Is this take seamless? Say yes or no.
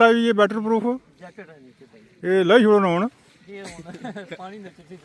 yes